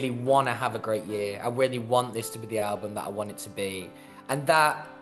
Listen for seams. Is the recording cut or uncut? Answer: uncut